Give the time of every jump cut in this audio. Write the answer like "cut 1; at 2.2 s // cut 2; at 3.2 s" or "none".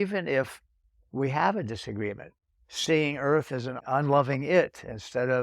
cut 1; at 3.7 s